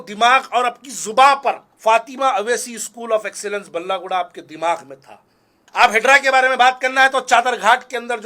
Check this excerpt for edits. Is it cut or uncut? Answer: cut